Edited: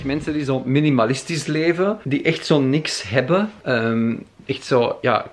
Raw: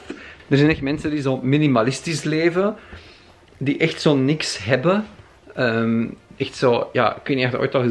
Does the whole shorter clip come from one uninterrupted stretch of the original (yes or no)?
no